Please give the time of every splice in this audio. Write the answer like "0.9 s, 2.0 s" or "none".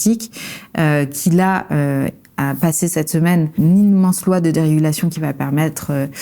3.6 s